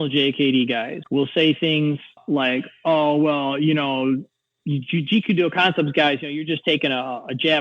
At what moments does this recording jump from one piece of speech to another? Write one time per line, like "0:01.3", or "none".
0:01.0
0:02.2